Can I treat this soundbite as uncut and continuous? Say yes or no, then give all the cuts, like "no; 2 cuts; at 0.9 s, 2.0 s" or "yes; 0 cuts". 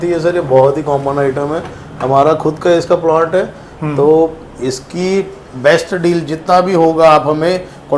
yes; 0 cuts